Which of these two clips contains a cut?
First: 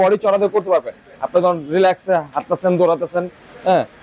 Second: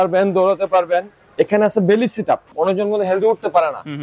second; 2 cuts; at 1.3 s, 2.5 s

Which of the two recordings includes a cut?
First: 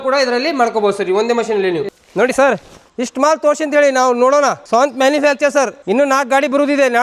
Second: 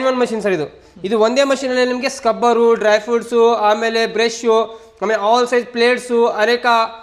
first; 4 cuts; at 1.9 s, 2.8 s, 4.6 s, 5.8 s

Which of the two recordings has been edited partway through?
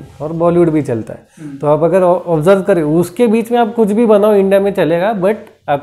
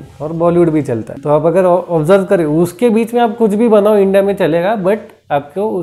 second; 1 cut; at 1.1 s

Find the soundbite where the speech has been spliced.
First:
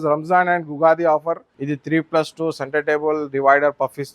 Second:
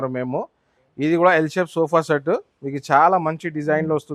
first; 1 cut; at 1.5 s

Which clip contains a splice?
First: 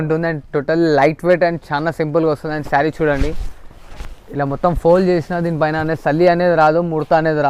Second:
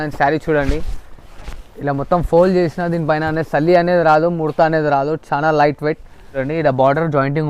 second; 1 cut; at 6.4 s

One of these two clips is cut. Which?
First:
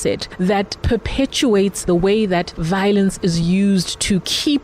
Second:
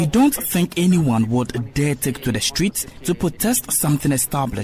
first; 2 cuts; at 1.9 s, 2.5 s

